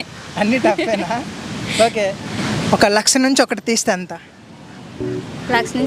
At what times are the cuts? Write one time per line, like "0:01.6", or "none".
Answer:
0:02.3